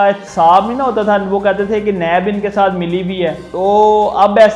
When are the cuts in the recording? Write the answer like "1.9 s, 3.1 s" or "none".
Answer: 3.4 s